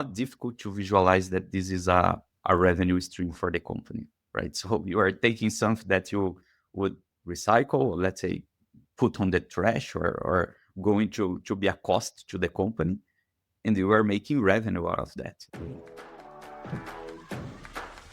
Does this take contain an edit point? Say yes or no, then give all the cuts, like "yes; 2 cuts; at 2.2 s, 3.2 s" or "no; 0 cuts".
yes; 1 cut; at 15.4 s